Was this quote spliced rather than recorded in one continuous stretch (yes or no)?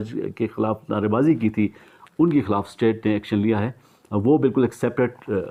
no